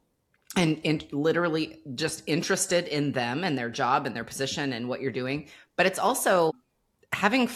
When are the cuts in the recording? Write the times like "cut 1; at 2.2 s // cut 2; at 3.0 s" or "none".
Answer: none